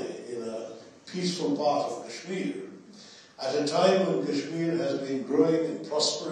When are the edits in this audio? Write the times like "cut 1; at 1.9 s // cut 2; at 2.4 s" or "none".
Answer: none

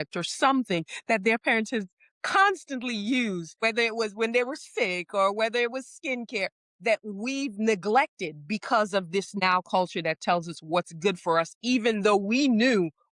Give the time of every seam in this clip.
cut 1; at 3.6 s // cut 2; at 9.4 s

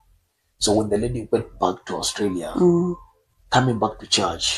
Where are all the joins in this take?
none

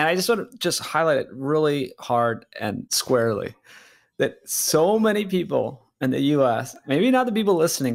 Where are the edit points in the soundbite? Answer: cut 1; at 2.9 s

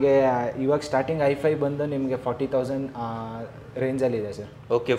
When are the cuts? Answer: none

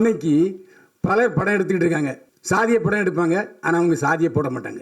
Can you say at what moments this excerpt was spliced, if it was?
cut 1; at 2.3 s

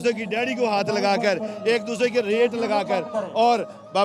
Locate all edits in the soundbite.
none

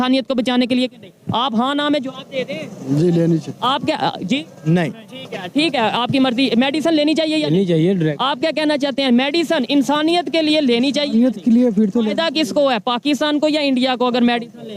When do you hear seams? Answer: none

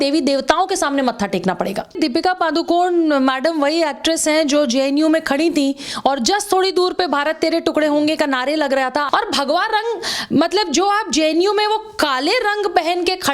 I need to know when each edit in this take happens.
cut 1; at 2.0 s // cut 2; at 9.1 s

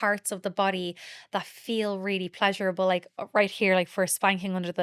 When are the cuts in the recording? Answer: none

